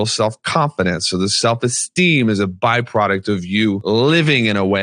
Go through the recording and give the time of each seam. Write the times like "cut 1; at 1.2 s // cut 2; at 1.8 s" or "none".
cut 1; at 3.8 s